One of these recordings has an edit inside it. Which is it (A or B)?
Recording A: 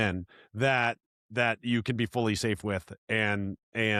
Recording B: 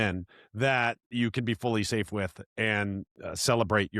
B